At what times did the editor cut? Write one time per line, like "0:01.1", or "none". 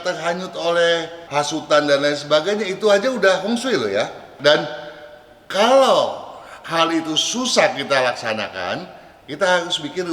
0:01.2
0:04.3